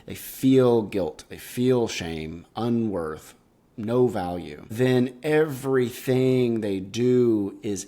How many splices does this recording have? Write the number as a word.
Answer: one